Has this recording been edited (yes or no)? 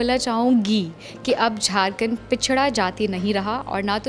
no